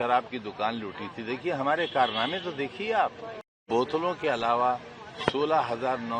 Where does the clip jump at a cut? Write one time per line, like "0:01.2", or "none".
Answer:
0:03.6

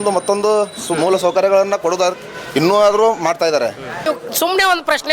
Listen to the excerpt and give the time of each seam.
0:03.9

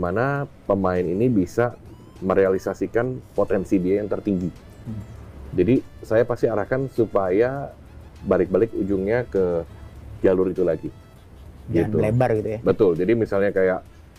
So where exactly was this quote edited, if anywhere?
none

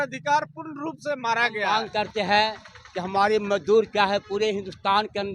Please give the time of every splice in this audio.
0:01.7

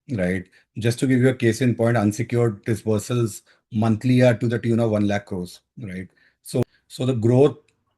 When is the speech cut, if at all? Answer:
0:06.6

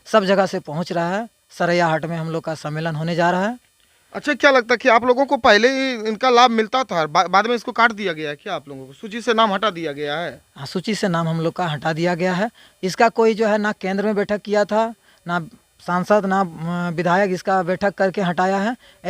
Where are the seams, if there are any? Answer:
none

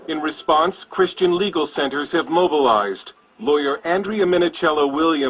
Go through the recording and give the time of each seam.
0:02.4

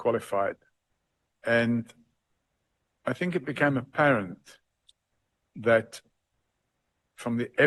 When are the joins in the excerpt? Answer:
none

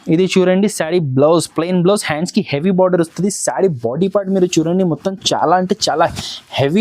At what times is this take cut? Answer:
none

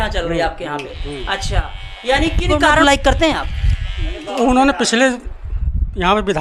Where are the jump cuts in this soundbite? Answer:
none

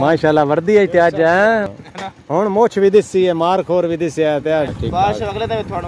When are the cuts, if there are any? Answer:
0:01.7
0:04.8

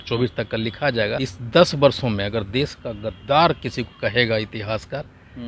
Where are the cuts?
0:01.3

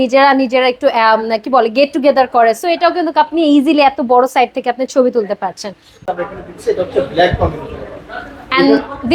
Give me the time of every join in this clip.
0:06.1

